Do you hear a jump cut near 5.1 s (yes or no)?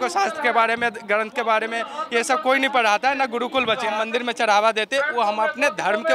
no